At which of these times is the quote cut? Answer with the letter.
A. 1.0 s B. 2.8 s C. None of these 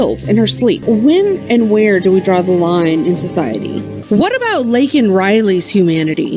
C